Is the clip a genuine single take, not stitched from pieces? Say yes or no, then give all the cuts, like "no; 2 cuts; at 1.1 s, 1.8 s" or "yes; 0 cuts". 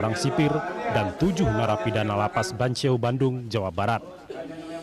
yes; 0 cuts